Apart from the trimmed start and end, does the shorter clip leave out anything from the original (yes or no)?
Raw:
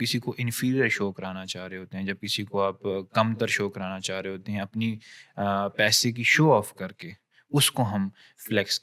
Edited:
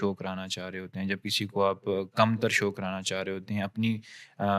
no